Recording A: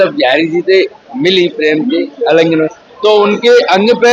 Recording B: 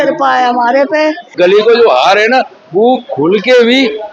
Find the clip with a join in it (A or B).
B